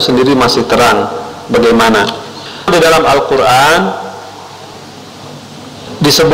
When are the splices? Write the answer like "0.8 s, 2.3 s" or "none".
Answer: 2.7 s